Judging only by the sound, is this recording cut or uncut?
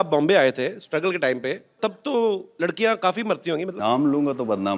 cut